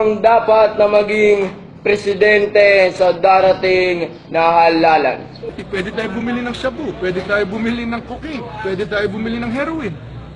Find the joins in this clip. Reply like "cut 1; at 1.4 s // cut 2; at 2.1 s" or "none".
cut 1; at 3.1 s